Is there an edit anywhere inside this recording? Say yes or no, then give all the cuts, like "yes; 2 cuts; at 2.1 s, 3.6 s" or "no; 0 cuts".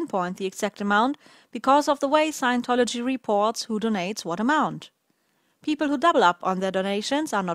no; 0 cuts